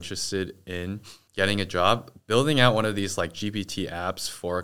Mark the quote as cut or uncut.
cut